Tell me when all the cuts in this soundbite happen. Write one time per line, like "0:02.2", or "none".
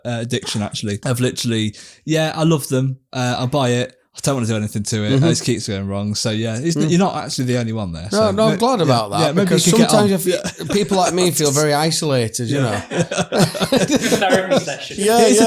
0:01.0